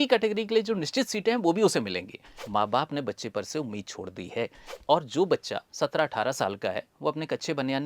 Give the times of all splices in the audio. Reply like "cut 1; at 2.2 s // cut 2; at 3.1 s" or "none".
cut 1; at 2.4 s // cut 2; at 4.7 s